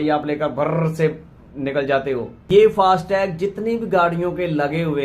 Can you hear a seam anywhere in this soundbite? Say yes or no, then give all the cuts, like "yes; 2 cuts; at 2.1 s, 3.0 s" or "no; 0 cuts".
yes; 1 cut; at 2.4 s